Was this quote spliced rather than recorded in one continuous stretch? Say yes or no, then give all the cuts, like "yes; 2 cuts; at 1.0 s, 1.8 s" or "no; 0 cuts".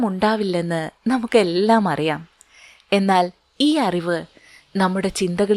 no; 0 cuts